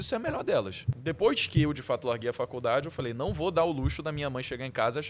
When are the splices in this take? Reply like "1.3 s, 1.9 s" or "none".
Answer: 0.9 s

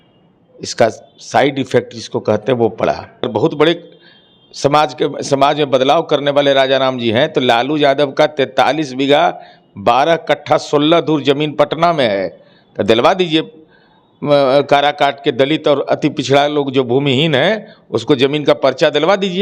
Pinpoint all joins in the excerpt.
3.3 s

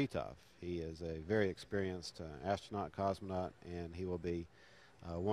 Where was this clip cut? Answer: 4.3 s

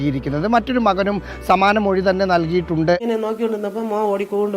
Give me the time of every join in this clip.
3.0 s

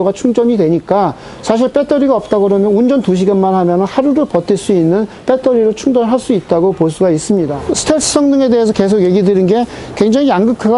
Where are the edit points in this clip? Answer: 7.6 s

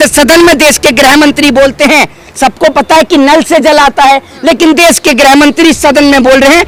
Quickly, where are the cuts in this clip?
none

